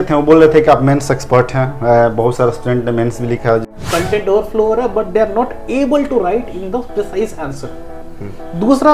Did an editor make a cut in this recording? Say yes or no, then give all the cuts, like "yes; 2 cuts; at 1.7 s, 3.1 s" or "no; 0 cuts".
yes; 1 cut; at 3.6 s